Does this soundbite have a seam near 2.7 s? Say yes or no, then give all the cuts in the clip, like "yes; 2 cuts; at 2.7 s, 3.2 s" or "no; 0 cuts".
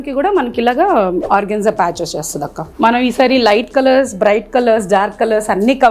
yes; 2 cuts; at 1.2 s, 2.7 s